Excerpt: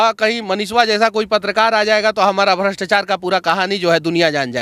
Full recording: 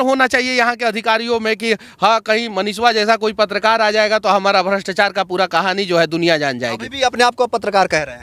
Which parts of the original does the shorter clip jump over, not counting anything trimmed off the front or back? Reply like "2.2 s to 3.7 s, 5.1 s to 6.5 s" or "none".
none

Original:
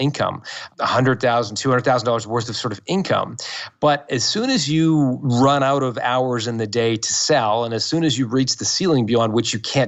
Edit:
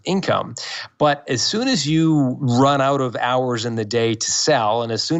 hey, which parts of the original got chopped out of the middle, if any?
none

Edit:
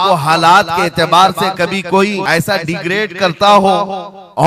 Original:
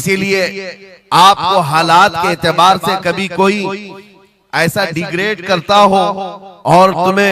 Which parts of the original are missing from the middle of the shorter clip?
3.7 s to 4.5 s

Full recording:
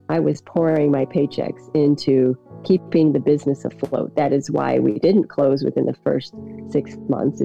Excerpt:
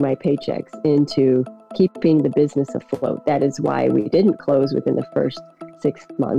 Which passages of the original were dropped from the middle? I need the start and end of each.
none

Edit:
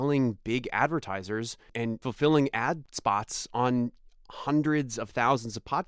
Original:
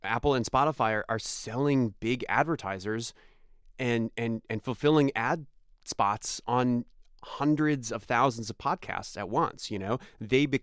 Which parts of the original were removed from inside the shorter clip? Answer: 3.6 s to 4.6 s, 5.5 s to 5.8 s

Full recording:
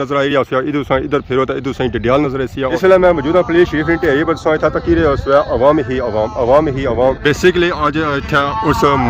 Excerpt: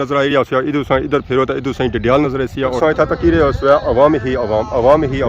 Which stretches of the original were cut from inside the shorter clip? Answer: 2.7 s to 4.4 s

